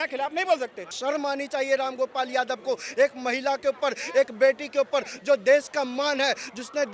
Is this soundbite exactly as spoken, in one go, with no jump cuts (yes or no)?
no